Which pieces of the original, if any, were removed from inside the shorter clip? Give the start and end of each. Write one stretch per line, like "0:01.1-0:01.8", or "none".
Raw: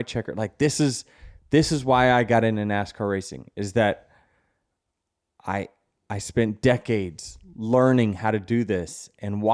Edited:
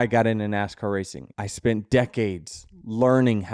0:03.4-0:05.9